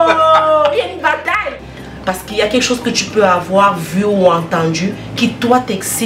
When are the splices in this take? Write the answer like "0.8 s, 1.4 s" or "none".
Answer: 1.5 s